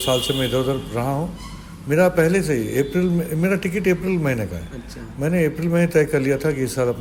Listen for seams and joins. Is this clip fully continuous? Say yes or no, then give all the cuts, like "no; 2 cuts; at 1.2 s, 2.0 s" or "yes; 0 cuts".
yes; 0 cuts